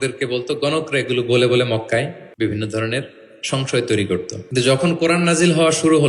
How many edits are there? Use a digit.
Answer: 2